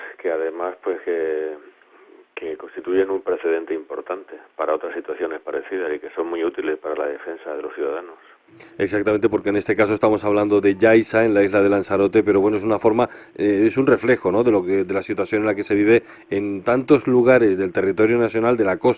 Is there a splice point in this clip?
no; 0 cuts

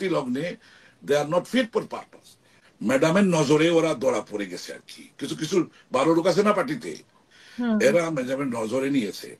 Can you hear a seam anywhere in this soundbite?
yes; 1 cut; at 2.7 s

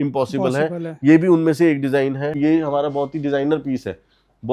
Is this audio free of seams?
no; 1 cut; at 2.4 s

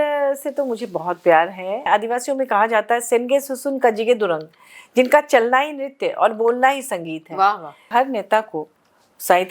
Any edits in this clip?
yes; 2 cuts; at 1.9 s, 7.8 s

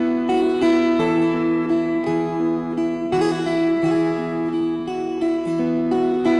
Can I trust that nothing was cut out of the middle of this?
yes; 0 cuts

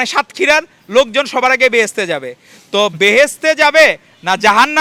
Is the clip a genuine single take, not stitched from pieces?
yes; 0 cuts

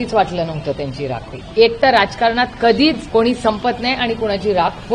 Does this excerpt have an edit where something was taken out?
yes; 2 cuts; at 1.4 s, 3.0 s

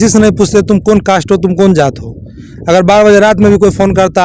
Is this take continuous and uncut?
yes; 0 cuts

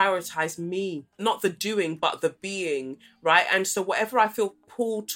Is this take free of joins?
no; 1 cut; at 1.2 s

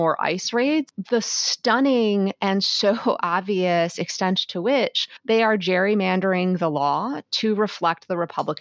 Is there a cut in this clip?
yes; 1 cut; at 1.0 s

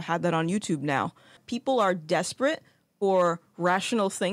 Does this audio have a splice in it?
yes; 1 cut; at 1.5 s

